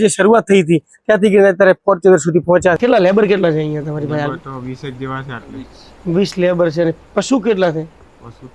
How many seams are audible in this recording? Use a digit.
1